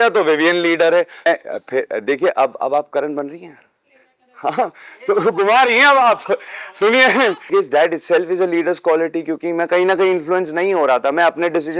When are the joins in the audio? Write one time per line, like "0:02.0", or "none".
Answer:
0:01.3
0:07.5